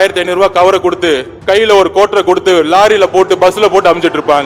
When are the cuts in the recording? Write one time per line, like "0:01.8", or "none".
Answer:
0:01.3